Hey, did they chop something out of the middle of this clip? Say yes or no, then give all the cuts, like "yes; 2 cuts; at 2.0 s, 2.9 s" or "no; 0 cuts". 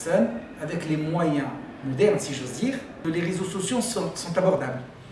yes; 1 cut; at 3.0 s